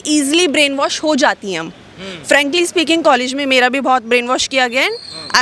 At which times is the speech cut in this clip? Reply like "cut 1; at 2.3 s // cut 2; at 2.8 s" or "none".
none